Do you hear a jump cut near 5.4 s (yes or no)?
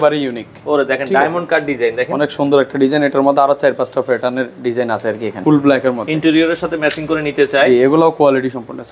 yes